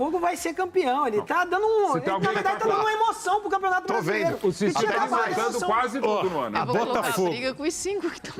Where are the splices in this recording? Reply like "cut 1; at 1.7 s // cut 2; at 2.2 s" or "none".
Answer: none